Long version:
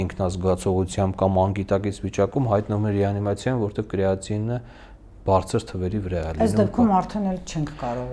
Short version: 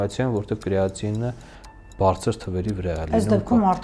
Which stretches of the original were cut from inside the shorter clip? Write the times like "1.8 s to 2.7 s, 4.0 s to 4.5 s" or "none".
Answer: none